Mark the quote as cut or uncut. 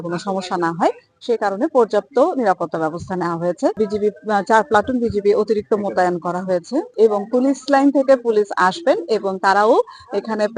uncut